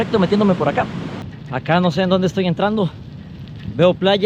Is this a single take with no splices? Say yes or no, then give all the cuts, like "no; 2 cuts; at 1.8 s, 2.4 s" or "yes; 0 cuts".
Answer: no; 1 cut; at 1.2 s